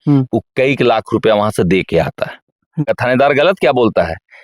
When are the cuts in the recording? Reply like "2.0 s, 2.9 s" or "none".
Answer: 2.9 s